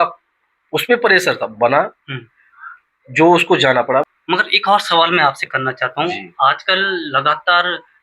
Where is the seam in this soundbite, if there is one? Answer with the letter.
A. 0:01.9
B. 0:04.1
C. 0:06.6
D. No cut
B